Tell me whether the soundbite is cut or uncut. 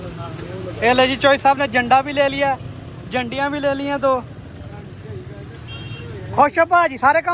uncut